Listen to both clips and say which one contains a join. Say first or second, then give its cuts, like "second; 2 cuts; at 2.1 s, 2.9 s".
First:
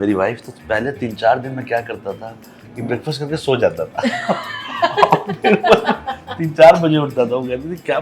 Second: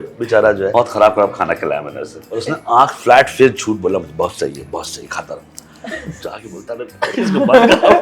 second; 2 cuts; at 0.7 s, 2.3 s